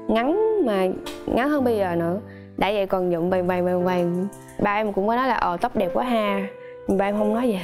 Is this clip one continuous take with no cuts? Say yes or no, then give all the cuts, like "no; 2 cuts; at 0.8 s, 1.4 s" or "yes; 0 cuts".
yes; 0 cuts